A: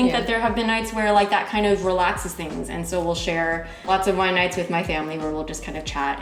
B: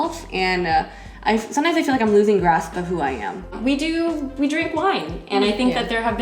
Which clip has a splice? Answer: B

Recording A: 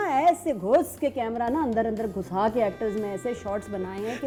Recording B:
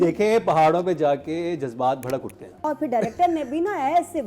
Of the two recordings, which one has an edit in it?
B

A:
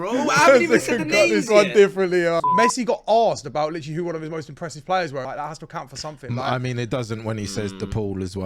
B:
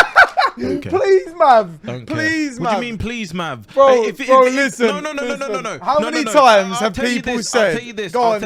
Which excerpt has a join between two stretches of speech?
A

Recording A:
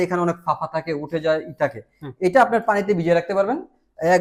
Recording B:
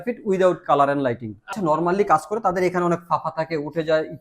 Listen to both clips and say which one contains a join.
B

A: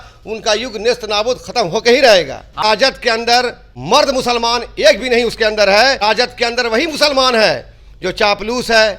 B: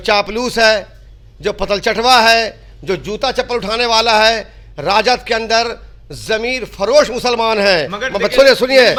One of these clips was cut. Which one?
A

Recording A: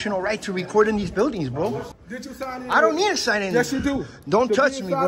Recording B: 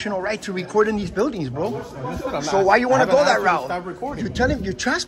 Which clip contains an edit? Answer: A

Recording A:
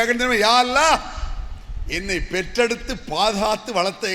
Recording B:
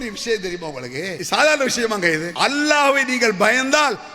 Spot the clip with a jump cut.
B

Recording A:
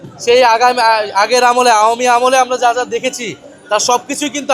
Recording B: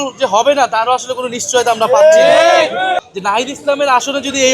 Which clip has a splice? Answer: B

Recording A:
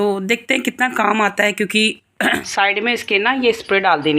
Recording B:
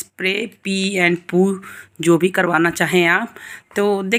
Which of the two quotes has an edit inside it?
A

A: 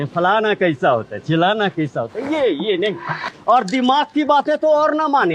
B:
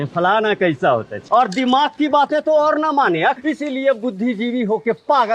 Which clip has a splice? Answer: B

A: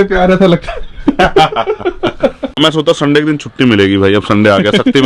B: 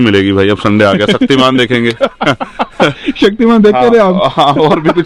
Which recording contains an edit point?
A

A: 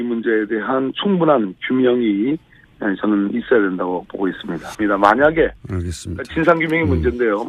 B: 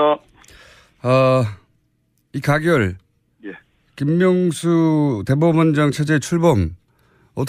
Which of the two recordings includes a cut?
A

